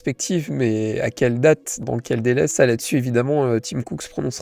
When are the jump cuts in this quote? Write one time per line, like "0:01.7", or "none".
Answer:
0:01.9